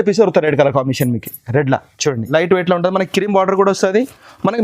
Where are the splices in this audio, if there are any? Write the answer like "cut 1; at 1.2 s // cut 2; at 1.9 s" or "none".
cut 1; at 2.3 s